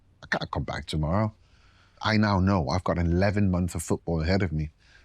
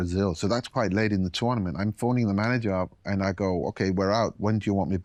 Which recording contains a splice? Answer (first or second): first